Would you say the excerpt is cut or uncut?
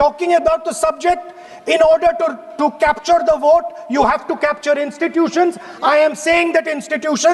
uncut